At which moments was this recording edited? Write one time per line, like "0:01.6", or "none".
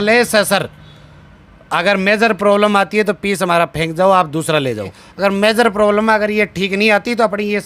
0:05.0